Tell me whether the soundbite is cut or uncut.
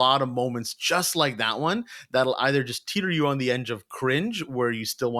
uncut